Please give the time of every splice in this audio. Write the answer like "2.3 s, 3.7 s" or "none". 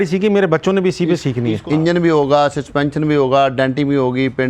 1.4 s

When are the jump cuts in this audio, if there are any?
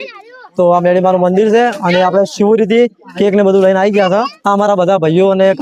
none

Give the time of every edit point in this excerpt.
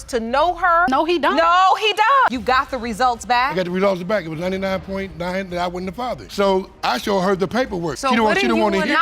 2.3 s

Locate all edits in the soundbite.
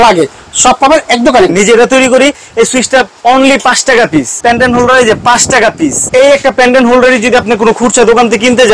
1.5 s, 4.3 s, 6.0 s

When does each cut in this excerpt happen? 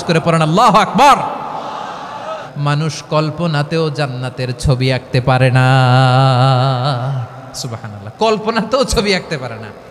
2.5 s

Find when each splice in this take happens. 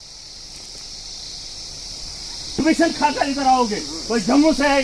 2.6 s

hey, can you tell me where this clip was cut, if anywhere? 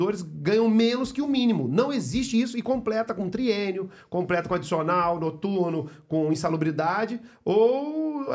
none

